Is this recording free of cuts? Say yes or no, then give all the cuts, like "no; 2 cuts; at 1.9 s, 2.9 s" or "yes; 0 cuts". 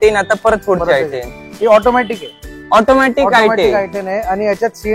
yes; 0 cuts